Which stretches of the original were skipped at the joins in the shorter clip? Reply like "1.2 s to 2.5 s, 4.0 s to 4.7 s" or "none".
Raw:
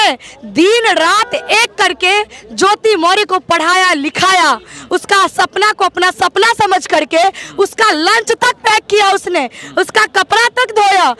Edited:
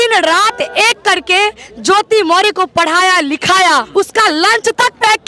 4.6 s to 7.5 s